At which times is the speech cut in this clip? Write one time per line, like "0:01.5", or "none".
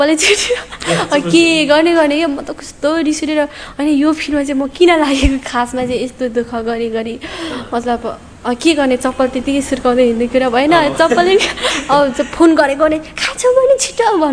none